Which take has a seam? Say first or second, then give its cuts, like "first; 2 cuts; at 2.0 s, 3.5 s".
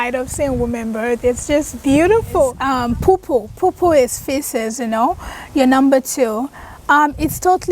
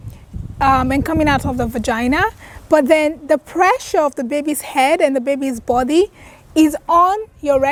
first; 1 cut; at 2.6 s